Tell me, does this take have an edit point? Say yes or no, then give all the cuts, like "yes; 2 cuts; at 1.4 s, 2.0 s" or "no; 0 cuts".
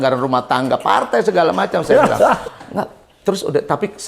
no; 0 cuts